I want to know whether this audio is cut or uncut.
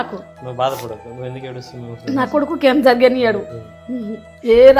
uncut